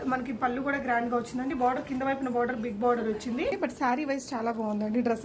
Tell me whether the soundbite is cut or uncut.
cut